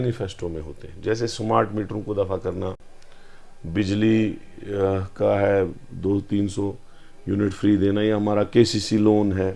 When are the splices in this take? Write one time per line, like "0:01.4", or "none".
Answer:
none